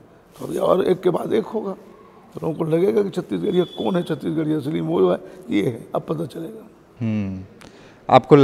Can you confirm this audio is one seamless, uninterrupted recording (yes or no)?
yes